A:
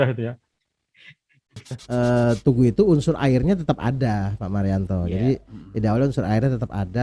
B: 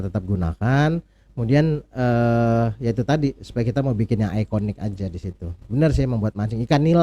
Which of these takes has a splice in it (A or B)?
A